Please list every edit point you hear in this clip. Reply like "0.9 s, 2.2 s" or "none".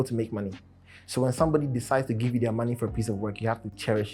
none